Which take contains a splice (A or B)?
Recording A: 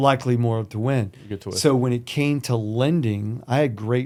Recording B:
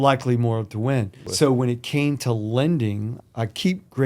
B